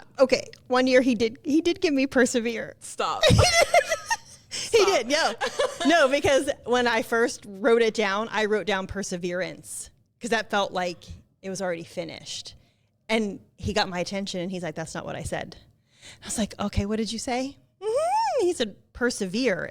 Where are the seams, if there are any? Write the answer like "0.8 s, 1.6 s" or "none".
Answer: none